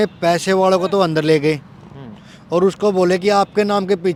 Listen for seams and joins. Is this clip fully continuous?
yes; 0 cuts

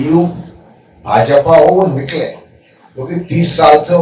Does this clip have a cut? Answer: no; 0 cuts

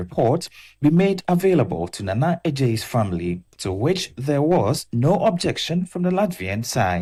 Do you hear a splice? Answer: no; 0 cuts

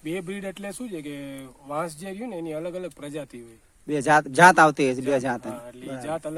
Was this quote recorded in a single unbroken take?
yes; 0 cuts

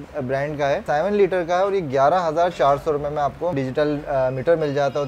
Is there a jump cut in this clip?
yes; 2 cuts; at 0.8 s, 3.5 s

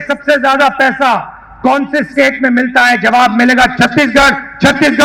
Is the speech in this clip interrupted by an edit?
no; 0 cuts

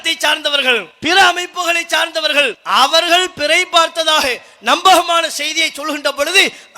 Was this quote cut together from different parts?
yes; 2 cuts; at 0.9 s, 2.6 s

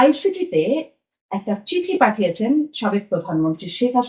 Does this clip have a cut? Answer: no; 0 cuts

